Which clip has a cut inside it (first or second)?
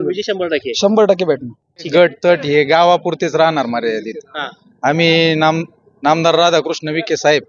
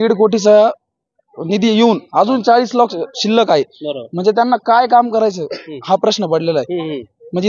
first